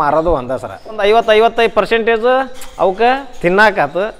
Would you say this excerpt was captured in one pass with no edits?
no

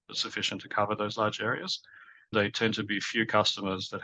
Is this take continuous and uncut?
no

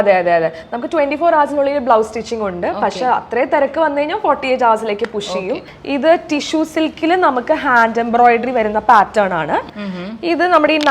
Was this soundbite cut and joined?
yes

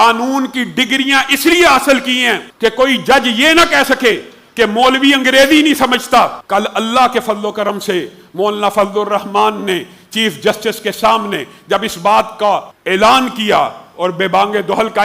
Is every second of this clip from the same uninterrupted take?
no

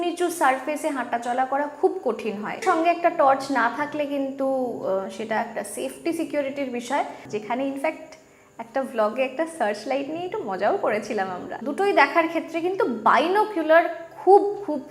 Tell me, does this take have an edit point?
yes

